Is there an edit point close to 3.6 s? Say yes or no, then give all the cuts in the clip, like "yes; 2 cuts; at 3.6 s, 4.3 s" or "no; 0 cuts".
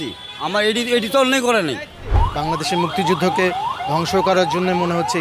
no; 1 cut; at 2.2 s